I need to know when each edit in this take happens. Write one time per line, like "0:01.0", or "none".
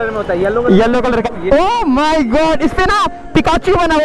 0:01.3